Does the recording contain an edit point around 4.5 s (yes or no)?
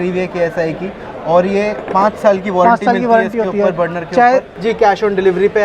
yes